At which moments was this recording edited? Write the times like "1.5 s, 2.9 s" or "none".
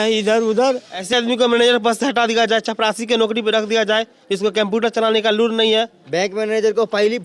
1.1 s, 6.0 s